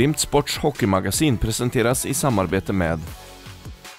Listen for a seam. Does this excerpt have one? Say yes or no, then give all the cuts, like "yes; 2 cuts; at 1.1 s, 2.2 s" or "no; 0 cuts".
no; 0 cuts